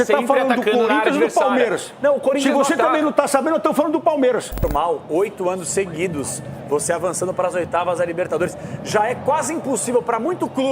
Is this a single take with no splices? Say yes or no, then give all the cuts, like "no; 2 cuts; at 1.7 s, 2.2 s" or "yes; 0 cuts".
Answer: no; 1 cut; at 4.6 s